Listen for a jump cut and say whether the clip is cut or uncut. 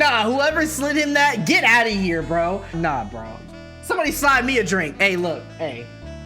cut